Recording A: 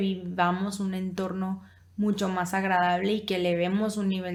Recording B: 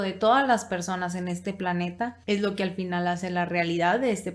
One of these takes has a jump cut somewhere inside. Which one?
B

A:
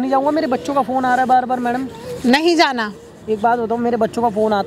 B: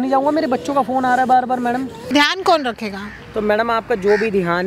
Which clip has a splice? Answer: B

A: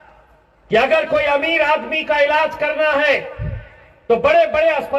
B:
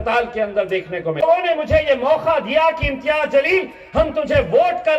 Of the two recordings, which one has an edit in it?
B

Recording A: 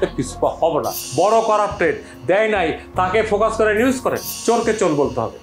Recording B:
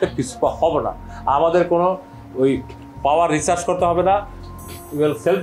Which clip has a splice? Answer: A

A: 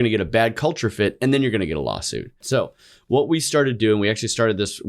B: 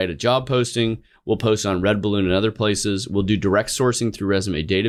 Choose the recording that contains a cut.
A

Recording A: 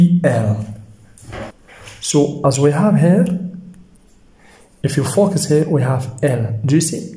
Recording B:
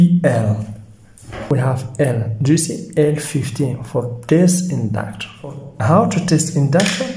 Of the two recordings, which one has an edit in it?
B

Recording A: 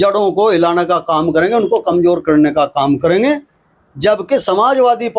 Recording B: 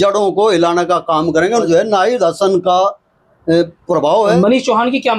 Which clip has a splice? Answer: B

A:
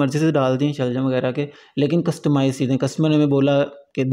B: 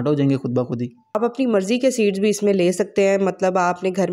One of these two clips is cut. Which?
B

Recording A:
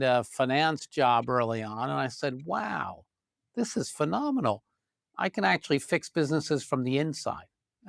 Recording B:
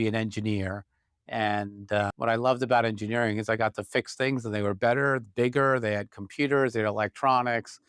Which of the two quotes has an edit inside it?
B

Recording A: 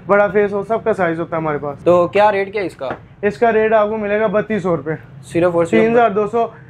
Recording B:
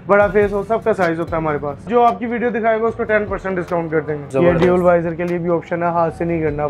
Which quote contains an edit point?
B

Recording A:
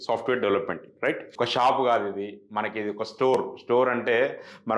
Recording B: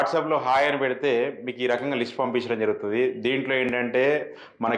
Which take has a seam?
A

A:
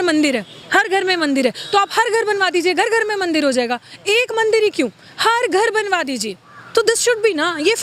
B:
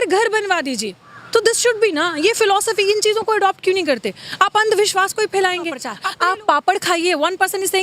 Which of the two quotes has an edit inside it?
B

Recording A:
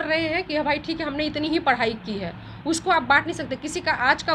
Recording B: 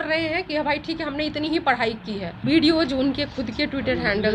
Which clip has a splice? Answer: B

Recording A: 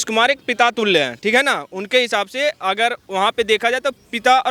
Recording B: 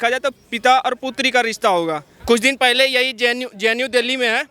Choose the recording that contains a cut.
B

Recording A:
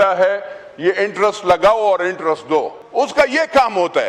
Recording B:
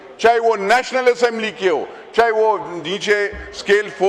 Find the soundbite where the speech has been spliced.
A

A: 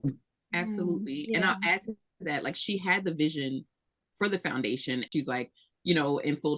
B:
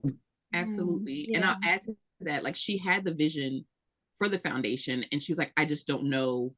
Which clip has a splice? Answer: A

